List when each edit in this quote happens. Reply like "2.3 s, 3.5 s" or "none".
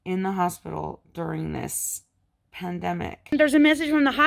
3.3 s